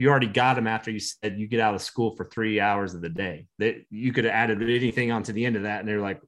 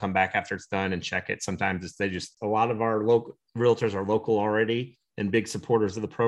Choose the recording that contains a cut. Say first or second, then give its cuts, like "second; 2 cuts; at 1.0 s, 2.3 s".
second; 1 cut; at 2.3 s